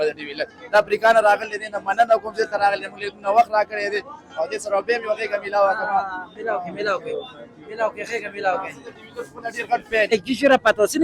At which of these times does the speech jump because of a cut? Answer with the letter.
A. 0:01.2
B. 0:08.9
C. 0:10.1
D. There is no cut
C